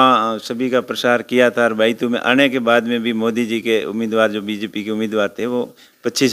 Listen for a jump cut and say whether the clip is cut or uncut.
uncut